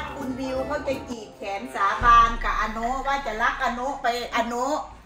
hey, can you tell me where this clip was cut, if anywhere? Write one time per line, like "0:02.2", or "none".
none